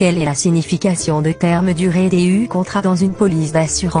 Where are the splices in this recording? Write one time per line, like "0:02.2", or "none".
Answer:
0:01.9